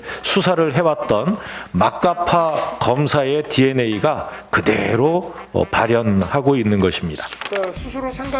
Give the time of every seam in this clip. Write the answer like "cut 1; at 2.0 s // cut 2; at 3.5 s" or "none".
cut 1; at 7.3 s